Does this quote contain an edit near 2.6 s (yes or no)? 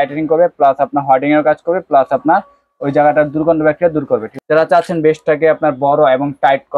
no